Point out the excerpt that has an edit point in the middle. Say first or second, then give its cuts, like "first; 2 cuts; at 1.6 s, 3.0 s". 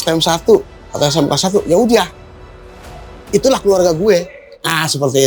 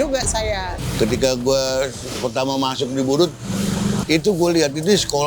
second; 1 cut; at 4.0 s